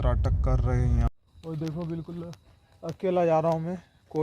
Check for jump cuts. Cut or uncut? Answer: cut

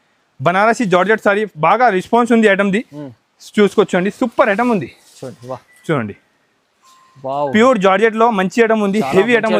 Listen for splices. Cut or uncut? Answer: uncut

